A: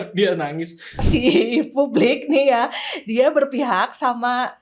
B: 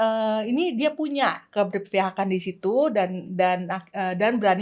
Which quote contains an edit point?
A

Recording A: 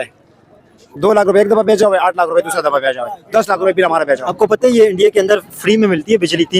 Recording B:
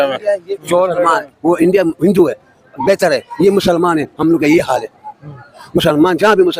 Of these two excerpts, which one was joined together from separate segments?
A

